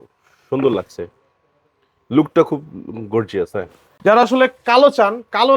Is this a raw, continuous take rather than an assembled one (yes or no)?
no